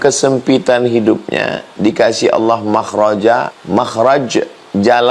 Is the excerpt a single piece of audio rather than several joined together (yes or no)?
no